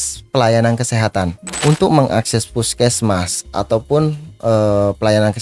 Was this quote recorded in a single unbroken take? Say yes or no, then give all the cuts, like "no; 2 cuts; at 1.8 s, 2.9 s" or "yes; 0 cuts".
no; 1 cut; at 1.4 s